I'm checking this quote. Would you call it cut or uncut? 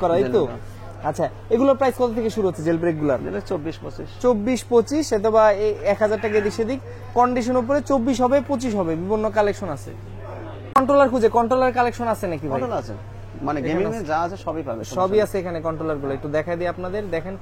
uncut